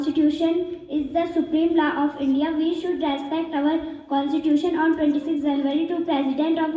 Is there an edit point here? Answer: no; 0 cuts

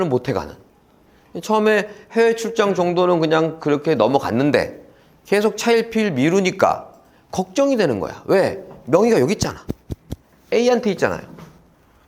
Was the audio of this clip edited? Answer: no; 0 cuts

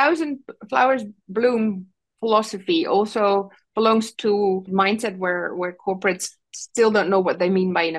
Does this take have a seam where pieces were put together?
yes; 1 cut; at 4.7 s

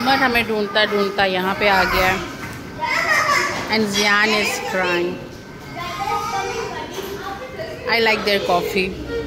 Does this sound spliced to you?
no; 0 cuts

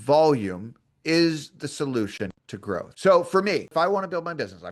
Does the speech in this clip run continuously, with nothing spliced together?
no; 1 cut; at 3.7 s

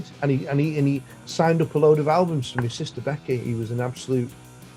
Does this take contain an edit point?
no; 0 cuts

